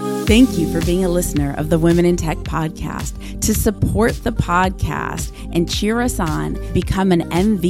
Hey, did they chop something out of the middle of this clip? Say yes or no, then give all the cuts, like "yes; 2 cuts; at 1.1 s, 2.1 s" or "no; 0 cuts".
no; 0 cuts